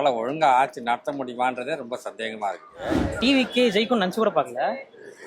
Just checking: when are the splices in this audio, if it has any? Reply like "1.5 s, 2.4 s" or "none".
3.0 s

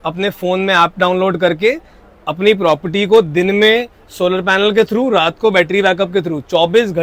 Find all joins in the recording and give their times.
none

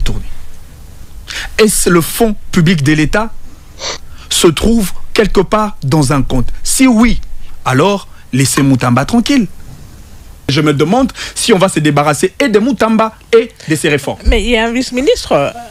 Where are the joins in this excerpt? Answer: 10.5 s

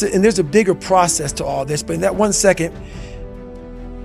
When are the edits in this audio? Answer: none

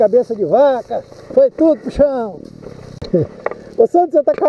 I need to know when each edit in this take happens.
3.1 s

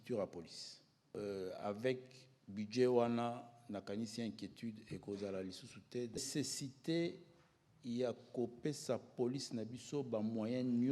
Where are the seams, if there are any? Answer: 1.1 s, 6.2 s

